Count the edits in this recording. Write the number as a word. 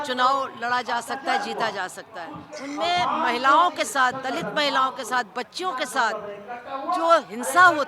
one